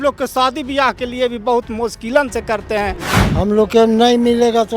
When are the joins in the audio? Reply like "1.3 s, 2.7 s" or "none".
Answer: 3.1 s